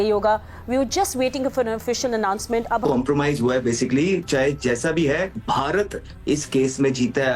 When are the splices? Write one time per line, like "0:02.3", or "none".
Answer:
0:02.8